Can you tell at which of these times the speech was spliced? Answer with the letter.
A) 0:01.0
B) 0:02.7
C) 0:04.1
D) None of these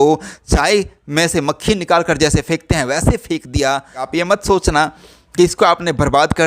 C